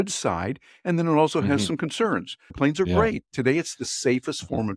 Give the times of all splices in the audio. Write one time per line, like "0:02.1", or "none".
0:02.5